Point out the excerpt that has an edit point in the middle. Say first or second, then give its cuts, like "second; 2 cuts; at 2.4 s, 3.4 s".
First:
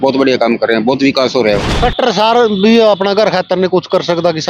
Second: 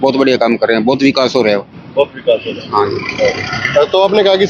first; 1 cut; at 1.8 s